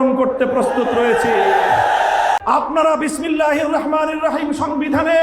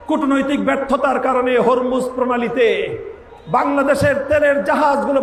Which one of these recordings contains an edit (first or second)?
first